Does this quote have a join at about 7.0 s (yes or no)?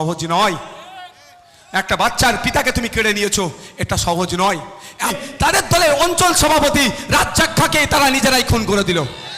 no